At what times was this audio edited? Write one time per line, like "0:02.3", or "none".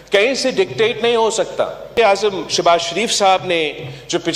0:01.9

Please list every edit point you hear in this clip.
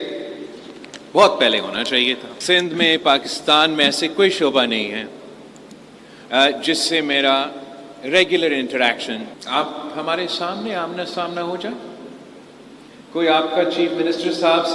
0:02.3
0:09.3

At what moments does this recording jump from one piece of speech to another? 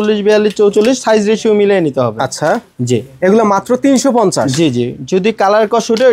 none

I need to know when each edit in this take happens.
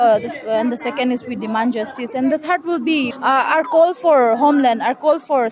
0:03.1

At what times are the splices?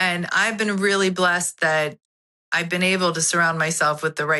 none

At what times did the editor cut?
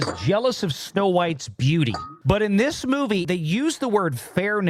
none

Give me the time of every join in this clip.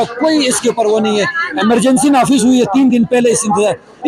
none

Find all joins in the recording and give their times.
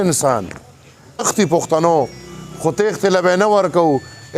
0:01.3

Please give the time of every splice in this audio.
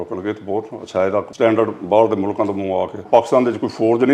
0:01.3
0:03.0

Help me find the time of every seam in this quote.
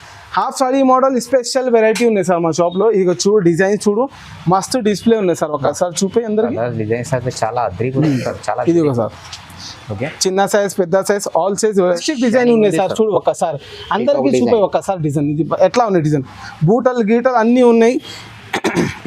0:11.9

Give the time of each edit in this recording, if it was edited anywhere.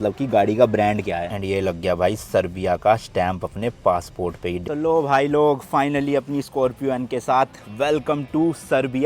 0:01.3
0:04.6

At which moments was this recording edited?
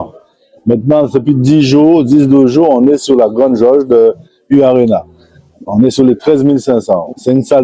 none

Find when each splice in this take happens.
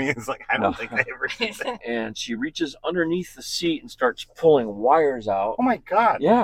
0:01.8
0:05.5

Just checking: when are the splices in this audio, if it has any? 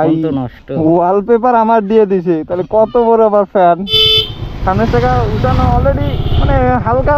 0:04.0

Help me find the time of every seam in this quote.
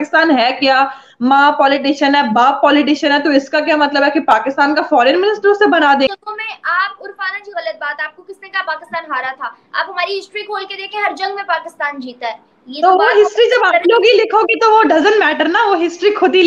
0:06.1

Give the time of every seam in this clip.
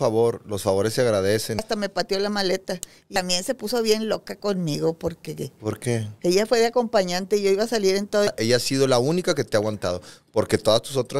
0:01.6
0:03.1
0:08.3

